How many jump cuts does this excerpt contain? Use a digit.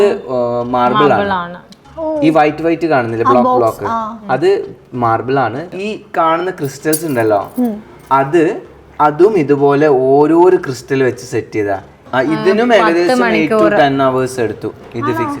2